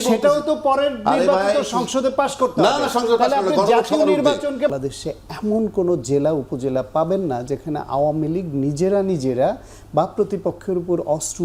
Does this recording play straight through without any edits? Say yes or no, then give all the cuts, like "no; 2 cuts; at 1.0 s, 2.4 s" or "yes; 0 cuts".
no; 1 cut; at 4.7 s